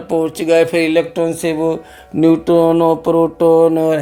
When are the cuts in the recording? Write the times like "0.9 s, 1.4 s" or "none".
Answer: none

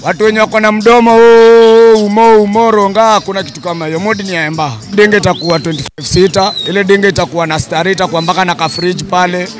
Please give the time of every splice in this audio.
4.9 s

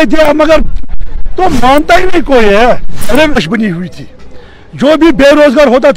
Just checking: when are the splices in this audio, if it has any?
3.4 s

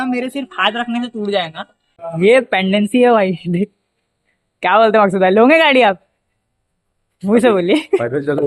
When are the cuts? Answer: 2.0 s

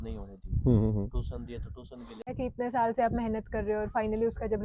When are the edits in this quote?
2.3 s

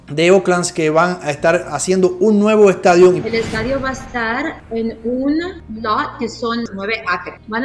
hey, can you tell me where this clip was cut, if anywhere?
3.2 s, 6.7 s

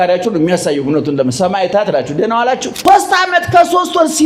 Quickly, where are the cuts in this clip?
2.7 s

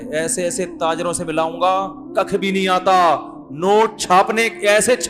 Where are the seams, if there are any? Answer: none

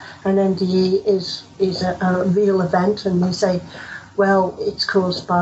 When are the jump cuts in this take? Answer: 1.4 s

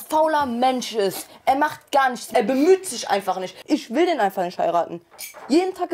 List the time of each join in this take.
3.5 s

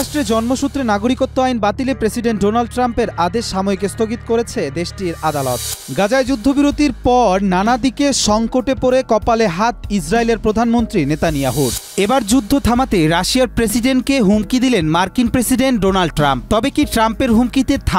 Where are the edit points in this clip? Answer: 5.7 s, 11.8 s

